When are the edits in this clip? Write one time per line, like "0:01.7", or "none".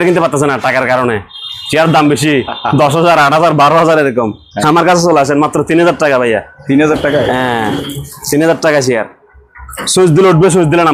none